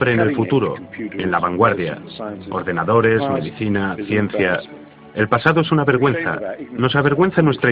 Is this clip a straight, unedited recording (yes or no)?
no